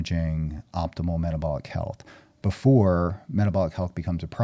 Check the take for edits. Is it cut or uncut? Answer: uncut